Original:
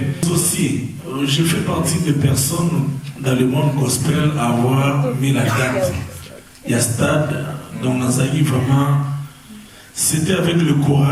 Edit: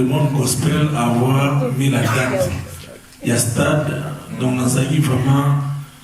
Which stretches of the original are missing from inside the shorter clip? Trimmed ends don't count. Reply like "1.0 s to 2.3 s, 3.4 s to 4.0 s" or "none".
none

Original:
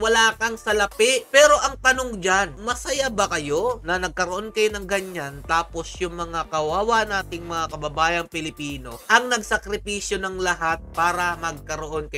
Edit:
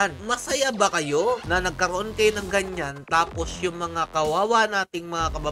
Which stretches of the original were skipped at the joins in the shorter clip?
none

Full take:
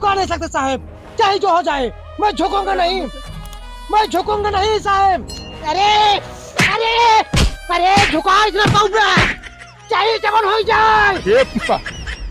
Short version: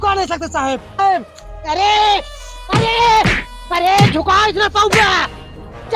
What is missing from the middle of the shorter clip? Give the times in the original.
1.0 s to 5.0 s

